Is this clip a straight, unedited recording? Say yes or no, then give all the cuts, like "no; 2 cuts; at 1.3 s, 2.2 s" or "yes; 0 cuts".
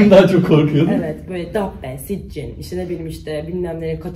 yes; 0 cuts